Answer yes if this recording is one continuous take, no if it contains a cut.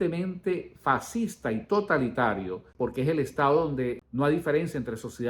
no